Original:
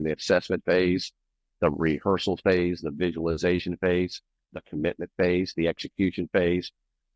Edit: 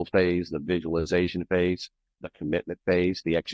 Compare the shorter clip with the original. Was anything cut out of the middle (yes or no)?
no